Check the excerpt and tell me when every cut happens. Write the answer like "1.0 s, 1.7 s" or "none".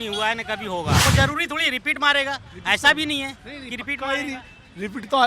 1.0 s